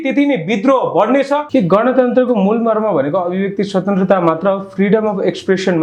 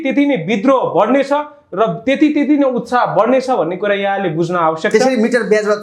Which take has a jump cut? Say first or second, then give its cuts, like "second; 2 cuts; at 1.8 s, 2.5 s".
first; 1 cut; at 1.5 s